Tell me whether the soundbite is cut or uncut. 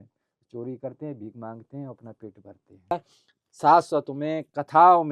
cut